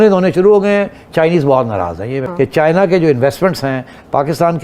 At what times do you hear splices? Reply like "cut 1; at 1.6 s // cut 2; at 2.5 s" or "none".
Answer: cut 1; at 2.3 s